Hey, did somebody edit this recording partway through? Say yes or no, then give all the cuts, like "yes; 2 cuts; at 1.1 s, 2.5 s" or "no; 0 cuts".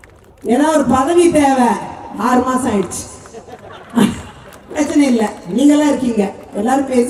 no; 0 cuts